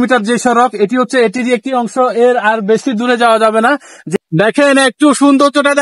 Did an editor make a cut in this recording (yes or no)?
yes